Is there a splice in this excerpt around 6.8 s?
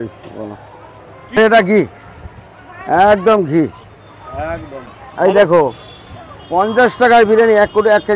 no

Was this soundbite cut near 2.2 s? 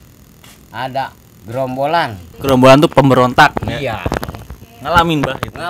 yes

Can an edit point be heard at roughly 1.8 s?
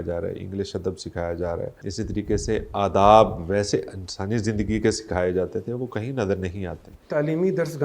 yes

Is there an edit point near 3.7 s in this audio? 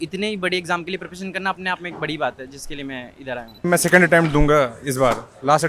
yes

